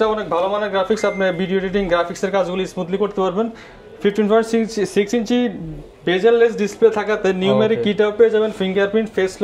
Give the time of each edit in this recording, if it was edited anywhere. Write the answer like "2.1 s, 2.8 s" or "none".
none